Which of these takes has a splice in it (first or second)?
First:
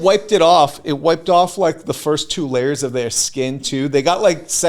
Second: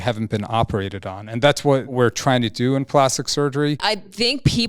second